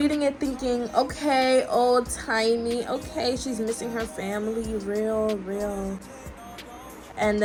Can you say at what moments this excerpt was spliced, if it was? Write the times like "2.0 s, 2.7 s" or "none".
none